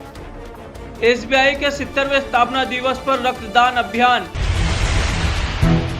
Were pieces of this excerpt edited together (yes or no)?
yes